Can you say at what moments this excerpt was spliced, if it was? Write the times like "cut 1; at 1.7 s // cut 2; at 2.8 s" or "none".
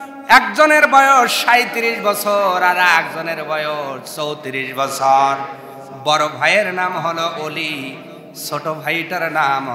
none